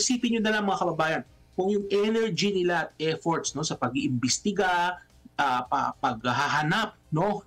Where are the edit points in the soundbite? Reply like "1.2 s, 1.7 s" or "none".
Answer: none